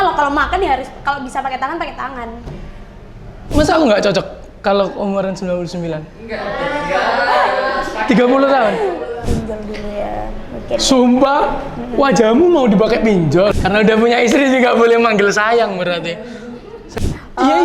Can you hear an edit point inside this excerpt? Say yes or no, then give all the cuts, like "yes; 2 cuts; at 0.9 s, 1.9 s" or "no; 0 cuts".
yes; 4 cuts; at 3.5 s, 9.2 s, 13.5 s, 16.8 s